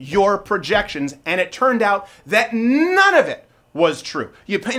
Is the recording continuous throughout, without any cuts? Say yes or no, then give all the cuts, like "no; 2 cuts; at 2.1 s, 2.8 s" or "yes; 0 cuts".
yes; 0 cuts